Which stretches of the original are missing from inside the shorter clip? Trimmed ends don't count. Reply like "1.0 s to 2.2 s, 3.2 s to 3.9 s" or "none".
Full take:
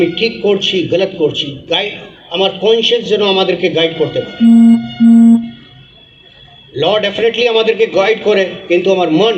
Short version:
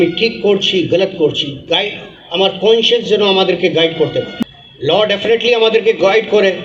4.3 s to 6.2 s